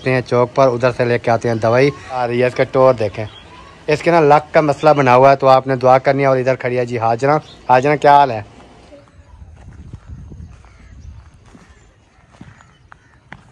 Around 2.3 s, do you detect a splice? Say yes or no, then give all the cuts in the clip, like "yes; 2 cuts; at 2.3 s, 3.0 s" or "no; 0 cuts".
yes; 2 cuts; at 2.3 s, 9.0 s